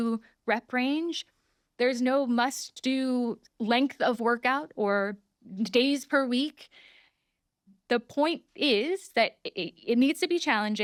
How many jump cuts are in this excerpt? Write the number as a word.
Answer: zero